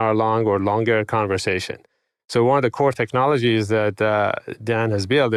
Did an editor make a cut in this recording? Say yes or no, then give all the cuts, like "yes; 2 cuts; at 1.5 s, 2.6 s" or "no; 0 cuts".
no; 0 cuts